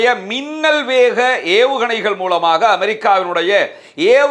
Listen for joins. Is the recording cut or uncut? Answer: uncut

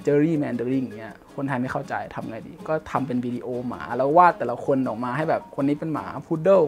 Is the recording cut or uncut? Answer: uncut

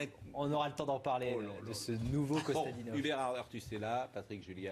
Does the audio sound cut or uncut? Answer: cut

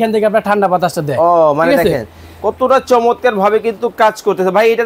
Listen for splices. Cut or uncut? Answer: uncut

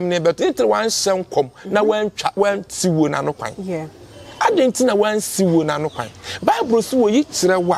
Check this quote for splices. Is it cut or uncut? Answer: uncut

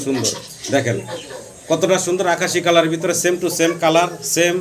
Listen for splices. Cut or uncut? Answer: uncut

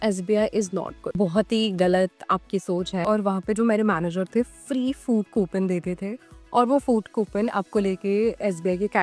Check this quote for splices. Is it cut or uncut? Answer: cut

